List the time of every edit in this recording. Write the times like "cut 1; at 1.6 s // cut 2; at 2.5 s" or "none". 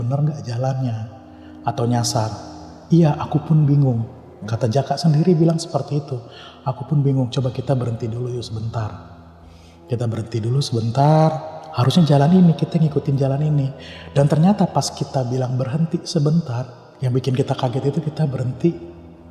none